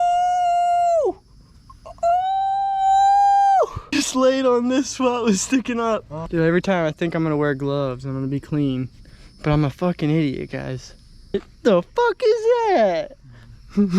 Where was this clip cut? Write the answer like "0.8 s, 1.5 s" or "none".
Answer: 3.9 s, 6.2 s, 11.3 s

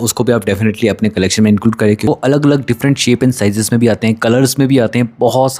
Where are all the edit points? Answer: 2.1 s

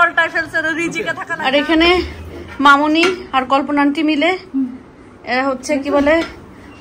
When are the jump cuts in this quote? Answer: 1.3 s

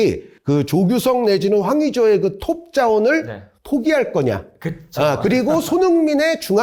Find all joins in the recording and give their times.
none

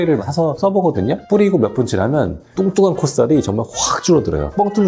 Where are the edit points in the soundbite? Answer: 1.2 s

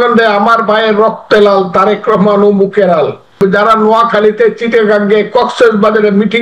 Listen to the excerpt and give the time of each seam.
3.4 s

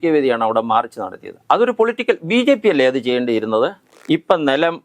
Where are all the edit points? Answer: 3.9 s

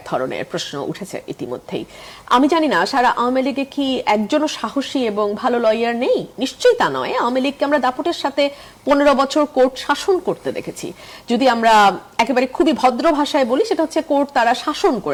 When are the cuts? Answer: none

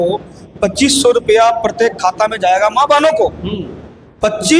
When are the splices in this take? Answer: none

